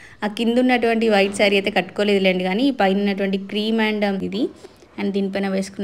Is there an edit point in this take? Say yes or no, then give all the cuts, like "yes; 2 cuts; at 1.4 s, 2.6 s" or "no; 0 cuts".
yes; 1 cut; at 4.3 s